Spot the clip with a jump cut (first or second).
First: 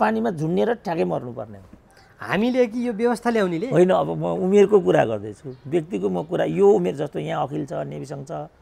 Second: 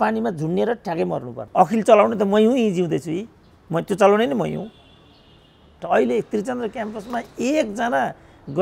second